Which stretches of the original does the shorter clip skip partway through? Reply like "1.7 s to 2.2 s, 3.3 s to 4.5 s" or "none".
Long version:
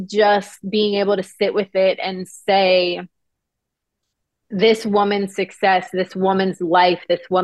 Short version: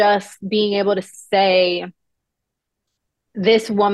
1.3 s to 2.2 s